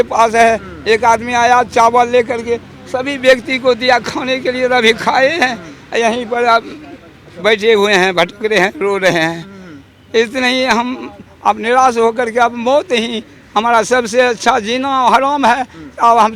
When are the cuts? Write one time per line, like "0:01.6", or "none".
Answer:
none